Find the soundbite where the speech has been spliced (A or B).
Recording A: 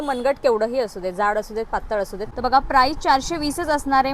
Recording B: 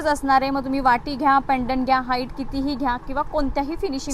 A